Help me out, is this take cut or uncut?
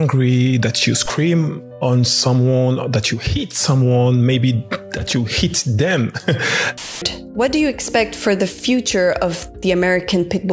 cut